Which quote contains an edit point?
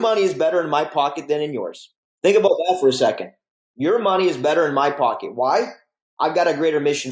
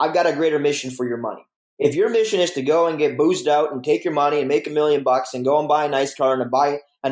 first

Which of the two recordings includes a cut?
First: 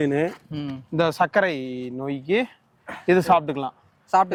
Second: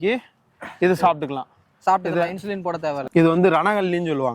second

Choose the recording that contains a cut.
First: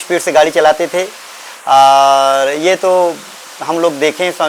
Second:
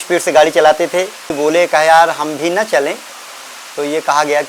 second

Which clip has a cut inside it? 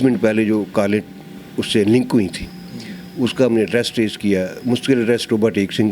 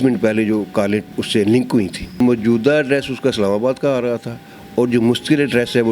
second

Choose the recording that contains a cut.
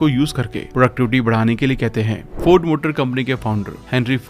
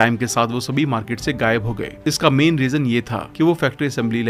first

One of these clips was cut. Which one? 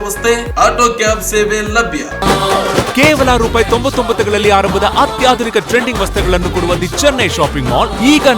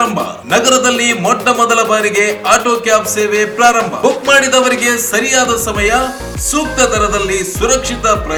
first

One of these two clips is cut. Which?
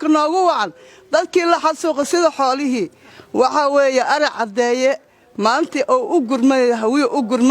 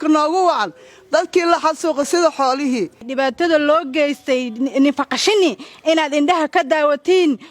second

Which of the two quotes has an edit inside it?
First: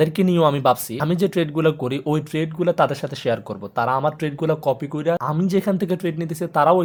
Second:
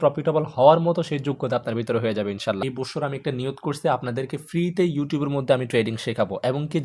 second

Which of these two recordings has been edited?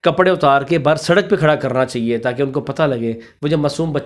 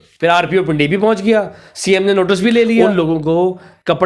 second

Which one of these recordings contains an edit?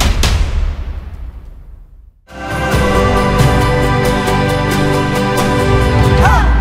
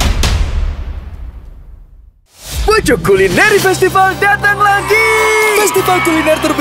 second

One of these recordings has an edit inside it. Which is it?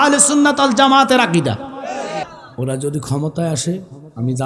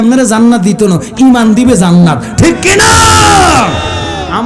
first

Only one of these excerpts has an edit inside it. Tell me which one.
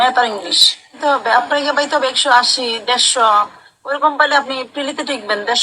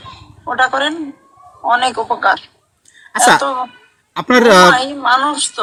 first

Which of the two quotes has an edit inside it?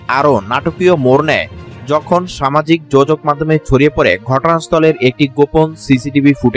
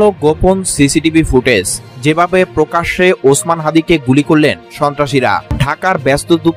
second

